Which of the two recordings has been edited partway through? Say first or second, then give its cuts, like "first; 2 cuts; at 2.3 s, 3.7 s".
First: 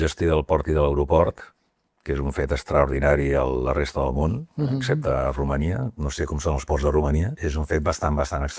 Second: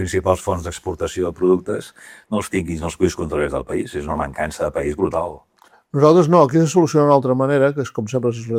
first; 1 cut; at 7.4 s